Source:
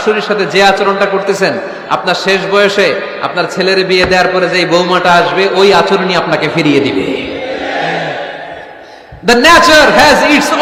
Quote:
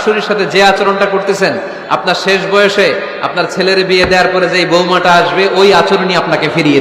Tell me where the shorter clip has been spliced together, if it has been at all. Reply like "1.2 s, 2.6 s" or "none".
none